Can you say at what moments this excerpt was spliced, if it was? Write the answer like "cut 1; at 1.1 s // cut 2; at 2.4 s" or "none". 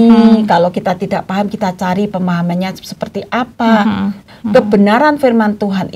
cut 1; at 4.2 s

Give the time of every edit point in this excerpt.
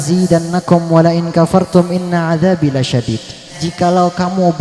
cut 1; at 3.6 s

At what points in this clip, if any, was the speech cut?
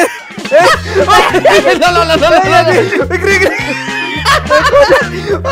none

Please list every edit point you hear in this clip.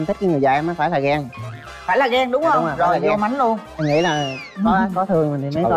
none

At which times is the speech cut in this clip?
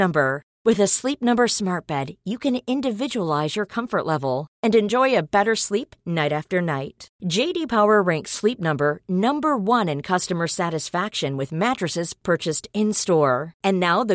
none

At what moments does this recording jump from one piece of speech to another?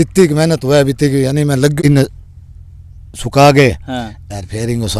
cut 1; at 1.7 s

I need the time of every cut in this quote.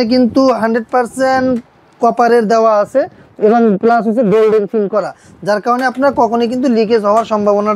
none

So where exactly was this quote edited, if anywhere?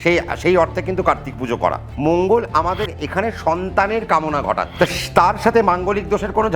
cut 1; at 1.9 s // cut 2; at 4.7 s

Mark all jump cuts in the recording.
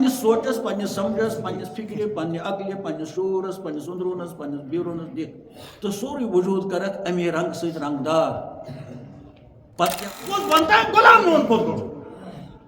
cut 1; at 10.4 s

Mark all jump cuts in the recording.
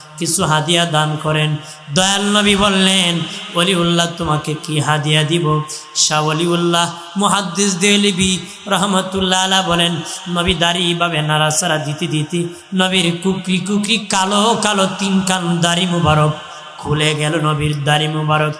none

